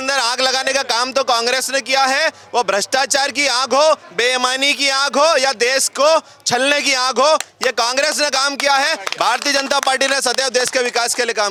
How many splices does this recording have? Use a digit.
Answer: 0